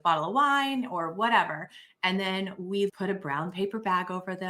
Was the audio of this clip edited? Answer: yes; 1 cut; at 2.9 s

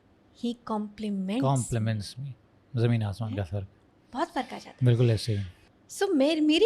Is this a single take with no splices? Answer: yes; 0 cuts

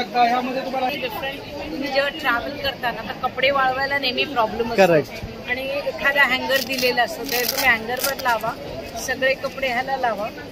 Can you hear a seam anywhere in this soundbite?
yes; 1 cut; at 0.9 s

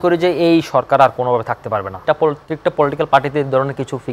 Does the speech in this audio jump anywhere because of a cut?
yes; 1 cut; at 2.0 s

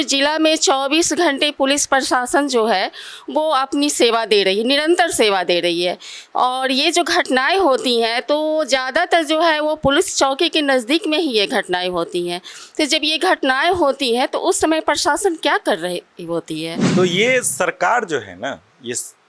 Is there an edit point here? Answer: yes; 1 cut; at 16.8 s

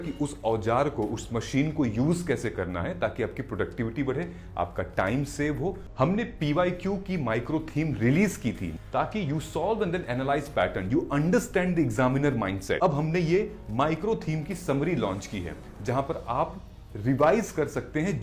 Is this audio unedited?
no; 3 cuts; at 5.8 s, 8.7 s, 12.8 s

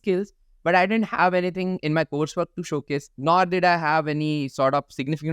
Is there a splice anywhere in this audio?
yes; 1 cut; at 3.1 s

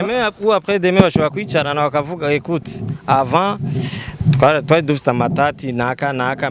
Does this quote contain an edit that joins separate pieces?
no; 0 cuts

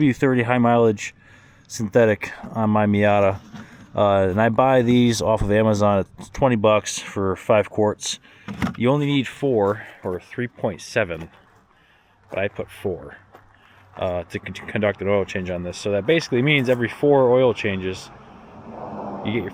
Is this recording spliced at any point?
no; 0 cuts

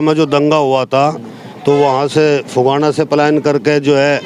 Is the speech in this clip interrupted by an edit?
no; 0 cuts

